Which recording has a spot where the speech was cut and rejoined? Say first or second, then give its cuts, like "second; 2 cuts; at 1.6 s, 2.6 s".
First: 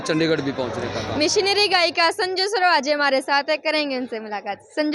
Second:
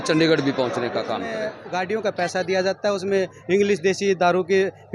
second; 1 cut; at 1.1 s